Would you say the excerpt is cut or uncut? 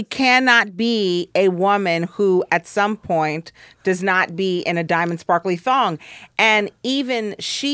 uncut